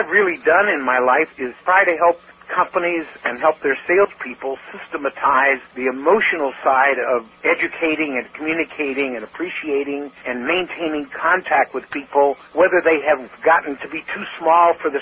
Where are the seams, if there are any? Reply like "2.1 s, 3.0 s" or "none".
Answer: 1.6 s, 2.3 s, 5.7 s, 7.3 s, 10.2 s, 12.4 s, 13.3 s

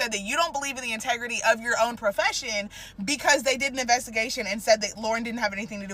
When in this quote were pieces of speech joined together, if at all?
none

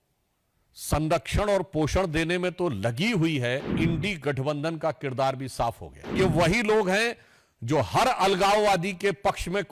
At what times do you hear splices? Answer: 3.7 s, 6.2 s

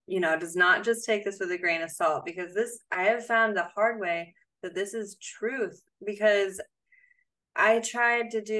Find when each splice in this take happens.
none

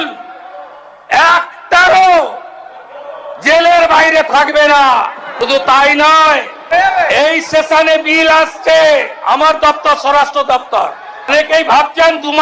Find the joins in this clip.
5.4 s, 6.7 s, 11.3 s

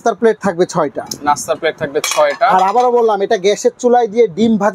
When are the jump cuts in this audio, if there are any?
none

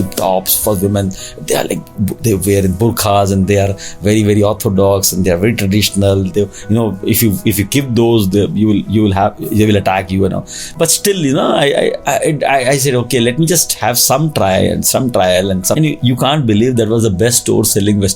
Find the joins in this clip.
15.7 s

